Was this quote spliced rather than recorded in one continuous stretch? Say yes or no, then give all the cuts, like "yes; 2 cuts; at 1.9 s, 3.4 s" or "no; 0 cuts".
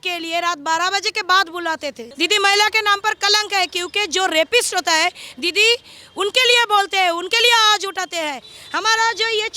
yes; 2 cuts; at 2.0 s, 8.5 s